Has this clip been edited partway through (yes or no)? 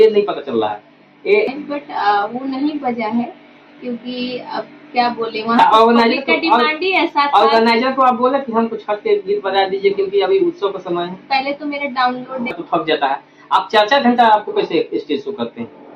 yes